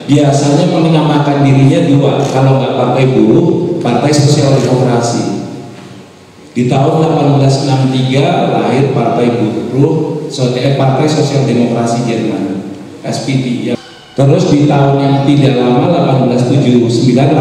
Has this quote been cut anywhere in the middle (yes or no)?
yes